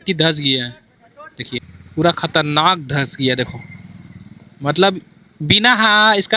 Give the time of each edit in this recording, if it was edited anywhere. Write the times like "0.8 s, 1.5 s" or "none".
1.8 s